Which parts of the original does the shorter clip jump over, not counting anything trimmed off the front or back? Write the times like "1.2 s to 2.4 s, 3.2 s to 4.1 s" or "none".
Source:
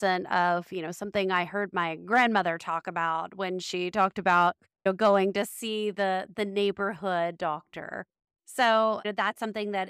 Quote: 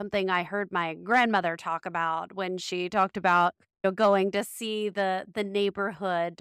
none